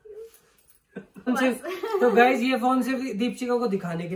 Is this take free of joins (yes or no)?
no